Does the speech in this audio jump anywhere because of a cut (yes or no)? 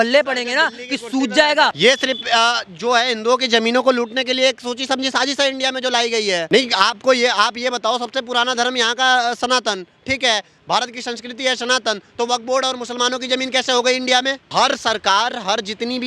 yes